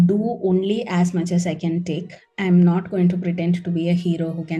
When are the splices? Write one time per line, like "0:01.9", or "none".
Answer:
none